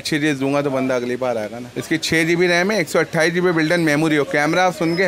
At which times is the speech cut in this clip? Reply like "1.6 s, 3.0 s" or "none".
1.7 s